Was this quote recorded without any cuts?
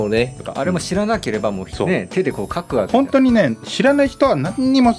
no; 1 cut; at 1.7 s

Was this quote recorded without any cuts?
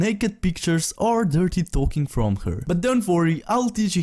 no; 1 cut; at 3.0 s

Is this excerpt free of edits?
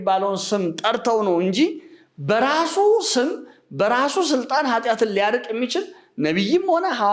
yes; 0 cuts

